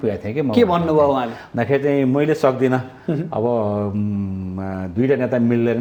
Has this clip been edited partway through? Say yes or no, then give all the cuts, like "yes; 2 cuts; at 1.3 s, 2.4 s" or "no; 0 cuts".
no; 0 cuts